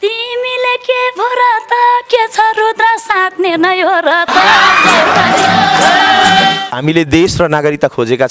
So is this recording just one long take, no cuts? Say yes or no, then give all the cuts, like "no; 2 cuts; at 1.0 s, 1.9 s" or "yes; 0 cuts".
no; 1 cut; at 6.7 s